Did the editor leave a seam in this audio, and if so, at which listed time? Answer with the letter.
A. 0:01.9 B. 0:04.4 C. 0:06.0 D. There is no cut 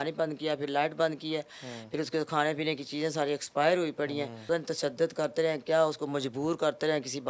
B